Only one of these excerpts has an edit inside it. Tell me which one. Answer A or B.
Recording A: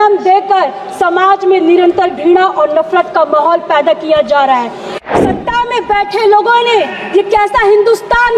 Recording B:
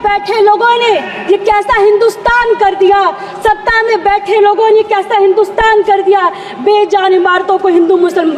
A